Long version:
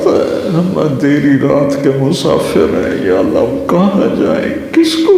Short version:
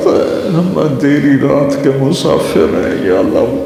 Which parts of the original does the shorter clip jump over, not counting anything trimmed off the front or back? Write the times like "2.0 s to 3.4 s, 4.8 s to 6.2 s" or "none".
none